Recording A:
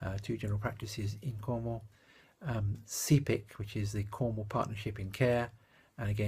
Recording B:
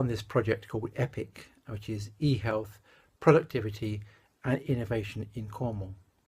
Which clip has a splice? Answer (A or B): B